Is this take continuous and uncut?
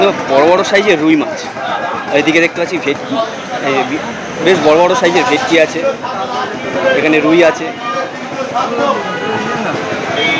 yes; 0 cuts

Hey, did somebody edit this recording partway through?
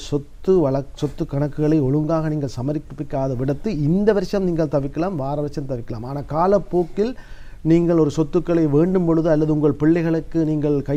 no; 0 cuts

